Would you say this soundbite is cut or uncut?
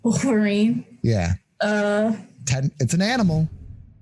uncut